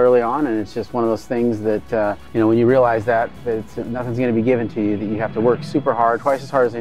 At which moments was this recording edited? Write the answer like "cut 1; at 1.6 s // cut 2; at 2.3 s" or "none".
cut 1; at 2.2 s

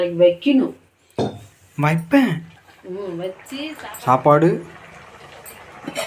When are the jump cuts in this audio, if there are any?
cut 1; at 3.8 s

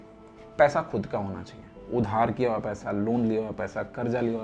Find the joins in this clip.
none

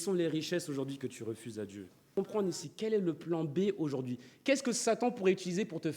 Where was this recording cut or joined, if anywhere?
cut 1; at 2.1 s

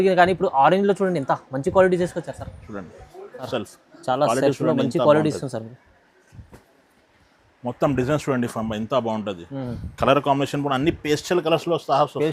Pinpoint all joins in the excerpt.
cut 1; at 3.5 s

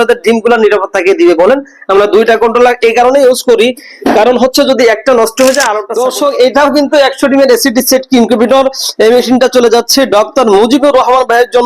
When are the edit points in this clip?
cut 1; at 5.8 s

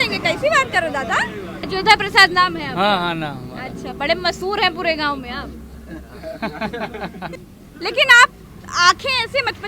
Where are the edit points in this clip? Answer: cut 1; at 1.6 s // cut 2; at 7.4 s

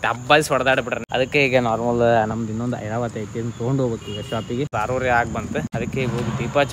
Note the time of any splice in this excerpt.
cut 1; at 1.0 s // cut 2; at 4.7 s // cut 3; at 5.7 s

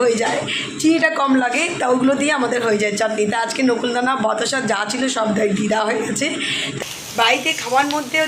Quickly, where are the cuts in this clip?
cut 1; at 6.7 s

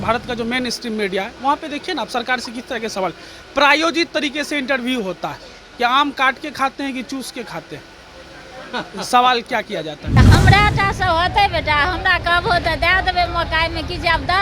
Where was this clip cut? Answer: cut 1; at 10.2 s

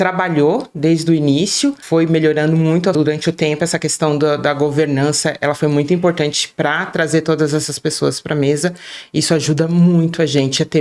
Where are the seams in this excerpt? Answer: cut 1; at 2.9 s

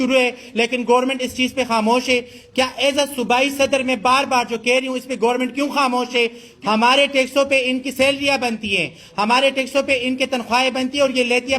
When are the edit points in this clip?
cut 1; at 6.4 s

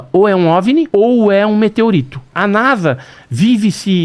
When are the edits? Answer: cut 1; at 0.9 s // cut 2; at 2.3 s

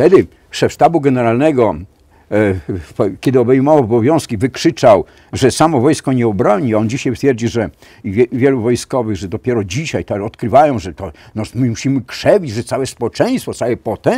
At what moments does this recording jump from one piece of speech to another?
none

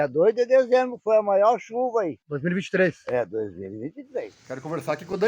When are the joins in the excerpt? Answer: cut 1; at 4.4 s

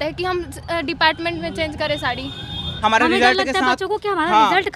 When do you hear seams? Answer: cut 1; at 2.6 s

